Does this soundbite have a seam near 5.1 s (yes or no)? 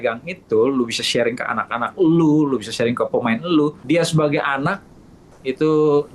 no